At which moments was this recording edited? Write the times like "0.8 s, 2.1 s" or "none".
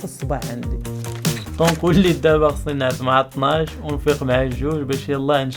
1.1 s